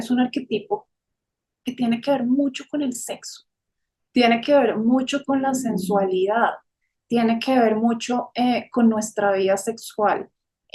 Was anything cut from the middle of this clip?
no; 0 cuts

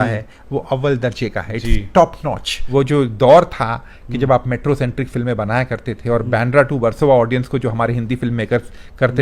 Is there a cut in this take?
yes; 1 cut; at 2.5 s

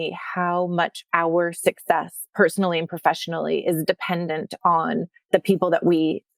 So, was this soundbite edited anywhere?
no; 0 cuts

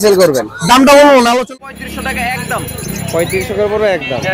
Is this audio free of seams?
no; 1 cut; at 1.5 s

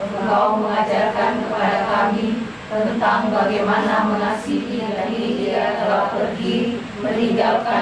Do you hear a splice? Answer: yes; 1 cut; at 5.1 s

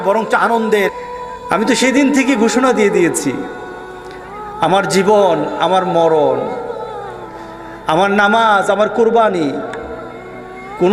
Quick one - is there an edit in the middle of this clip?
yes; 1 cut; at 0.9 s

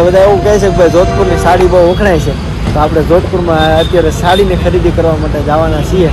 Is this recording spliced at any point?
no; 0 cuts

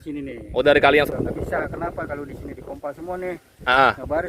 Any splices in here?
yes; 1 cut; at 1.1 s

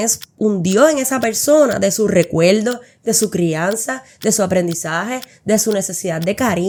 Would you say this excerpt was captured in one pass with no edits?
yes; 0 cuts

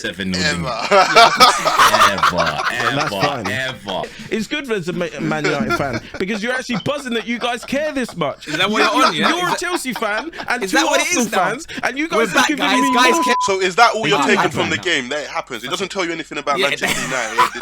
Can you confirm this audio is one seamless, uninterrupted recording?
no; 2 cuts; at 4.2 s, 13.4 s

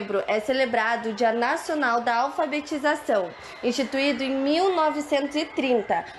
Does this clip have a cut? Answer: no; 0 cuts

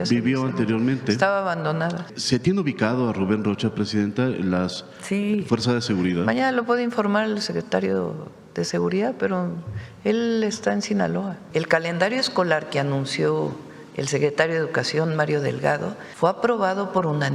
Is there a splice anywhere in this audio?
yes; 3 cuts; at 2.1 s, 11.4 s, 16.0 s

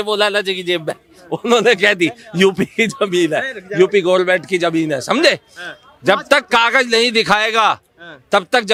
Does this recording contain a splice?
no; 0 cuts

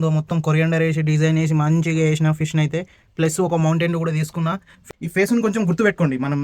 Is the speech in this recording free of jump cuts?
no; 1 cut; at 4.9 s

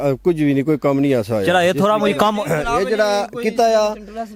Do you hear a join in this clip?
no; 0 cuts

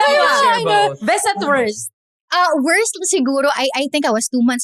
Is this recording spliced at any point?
no; 0 cuts

